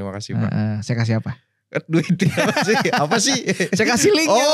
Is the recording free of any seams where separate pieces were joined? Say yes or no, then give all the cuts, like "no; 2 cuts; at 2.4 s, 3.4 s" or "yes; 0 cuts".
yes; 0 cuts